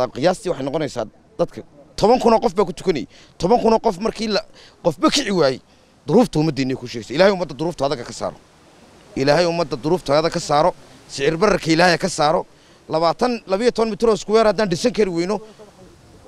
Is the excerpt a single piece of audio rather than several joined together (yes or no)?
yes